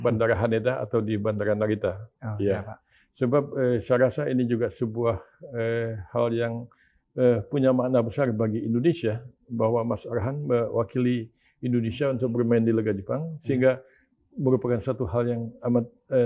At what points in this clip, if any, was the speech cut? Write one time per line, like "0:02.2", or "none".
none